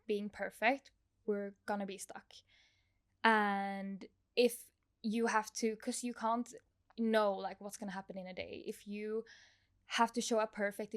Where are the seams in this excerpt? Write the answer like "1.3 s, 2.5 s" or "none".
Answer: none